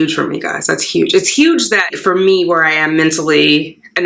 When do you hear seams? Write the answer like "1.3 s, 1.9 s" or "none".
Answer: 2.0 s